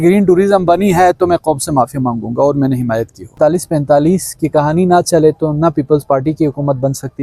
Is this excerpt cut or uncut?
cut